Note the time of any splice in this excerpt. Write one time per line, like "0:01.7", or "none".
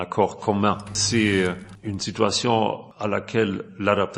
0:01.0
0:01.7
0:02.9